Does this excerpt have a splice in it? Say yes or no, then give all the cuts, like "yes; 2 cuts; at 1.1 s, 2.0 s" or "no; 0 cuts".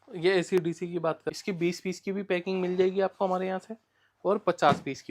yes; 1 cut; at 1.2 s